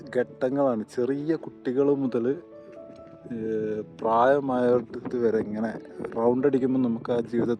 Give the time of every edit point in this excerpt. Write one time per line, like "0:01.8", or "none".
none